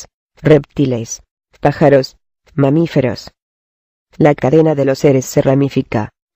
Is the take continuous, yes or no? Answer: no